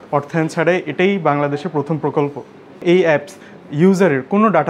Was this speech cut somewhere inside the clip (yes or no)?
yes